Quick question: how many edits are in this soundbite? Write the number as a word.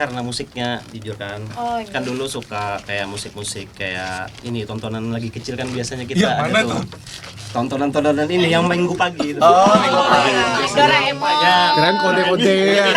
zero